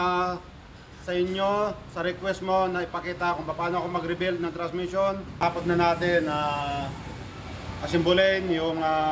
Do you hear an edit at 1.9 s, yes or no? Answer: no